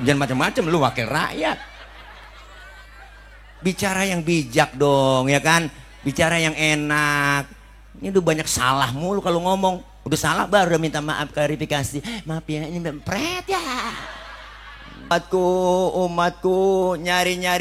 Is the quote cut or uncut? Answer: cut